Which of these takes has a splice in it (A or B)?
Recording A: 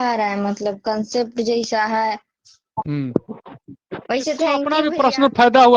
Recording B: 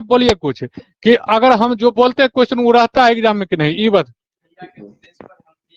A